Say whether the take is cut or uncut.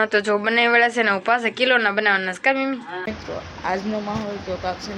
cut